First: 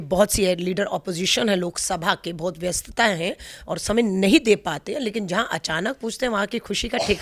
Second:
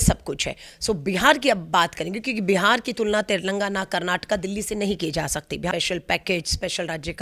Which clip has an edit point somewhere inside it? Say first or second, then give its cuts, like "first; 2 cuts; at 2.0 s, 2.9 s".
second; 1 cut; at 5.7 s